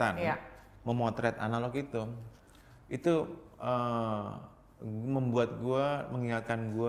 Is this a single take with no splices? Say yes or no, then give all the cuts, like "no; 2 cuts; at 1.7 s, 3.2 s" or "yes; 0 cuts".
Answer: yes; 0 cuts